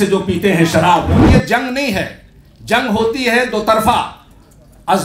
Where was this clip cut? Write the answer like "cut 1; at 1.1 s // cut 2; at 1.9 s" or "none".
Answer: cut 1; at 1.2 s